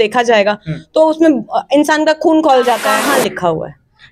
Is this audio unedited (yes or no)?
no